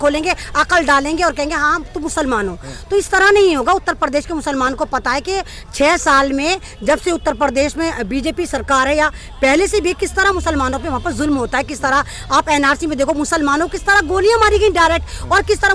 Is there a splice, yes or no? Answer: no